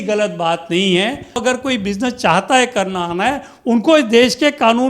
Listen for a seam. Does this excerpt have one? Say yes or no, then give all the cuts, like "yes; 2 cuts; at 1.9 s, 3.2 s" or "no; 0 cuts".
yes; 1 cut; at 1.4 s